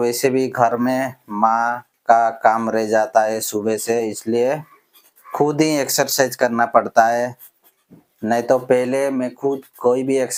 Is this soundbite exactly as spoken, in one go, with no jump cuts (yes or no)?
yes